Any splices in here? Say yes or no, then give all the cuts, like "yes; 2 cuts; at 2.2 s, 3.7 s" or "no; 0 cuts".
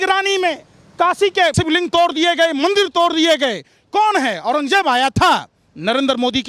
yes; 1 cut; at 1.5 s